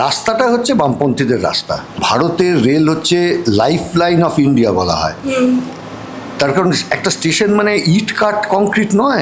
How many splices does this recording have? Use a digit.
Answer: 1